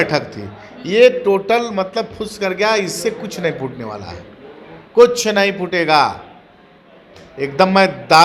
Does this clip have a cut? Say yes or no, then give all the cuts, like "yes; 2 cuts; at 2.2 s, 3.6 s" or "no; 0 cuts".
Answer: no; 0 cuts